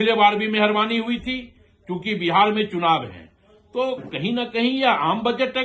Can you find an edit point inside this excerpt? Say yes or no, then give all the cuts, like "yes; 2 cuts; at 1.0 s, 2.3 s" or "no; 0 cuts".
no; 0 cuts